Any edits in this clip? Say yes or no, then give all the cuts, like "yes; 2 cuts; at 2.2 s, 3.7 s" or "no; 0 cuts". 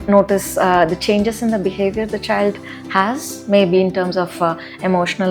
no; 0 cuts